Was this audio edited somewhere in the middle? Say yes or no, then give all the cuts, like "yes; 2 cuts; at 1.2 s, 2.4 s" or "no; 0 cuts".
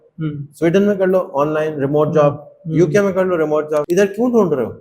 yes; 1 cut; at 3.9 s